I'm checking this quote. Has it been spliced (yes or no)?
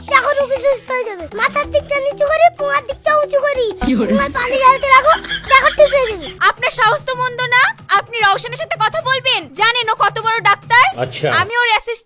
yes